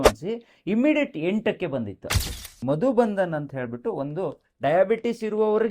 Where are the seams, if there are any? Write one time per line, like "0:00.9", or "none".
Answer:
0:02.2